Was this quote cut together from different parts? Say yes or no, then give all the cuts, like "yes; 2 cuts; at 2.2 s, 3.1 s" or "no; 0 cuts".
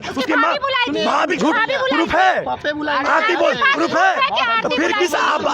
yes; 1 cut; at 1.3 s